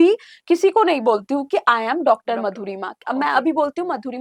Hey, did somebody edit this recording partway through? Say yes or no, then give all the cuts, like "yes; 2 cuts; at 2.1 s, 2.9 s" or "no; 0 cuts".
no; 0 cuts